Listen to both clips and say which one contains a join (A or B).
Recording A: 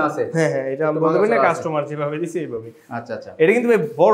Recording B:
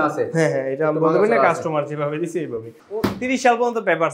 B